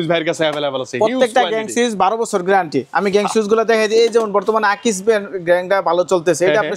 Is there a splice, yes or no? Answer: no